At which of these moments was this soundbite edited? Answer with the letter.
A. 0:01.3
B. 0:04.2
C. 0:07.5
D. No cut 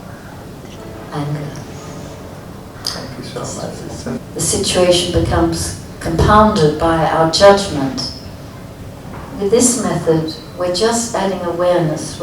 B